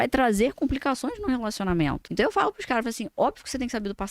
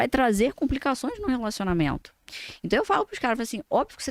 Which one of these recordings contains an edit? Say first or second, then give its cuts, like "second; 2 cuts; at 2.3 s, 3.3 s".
first; 1 cut; at 2.0 s